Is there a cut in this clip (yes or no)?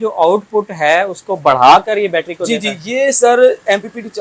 no